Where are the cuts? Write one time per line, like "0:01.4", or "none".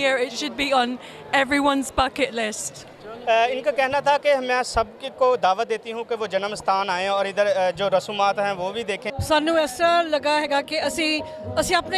0:09.1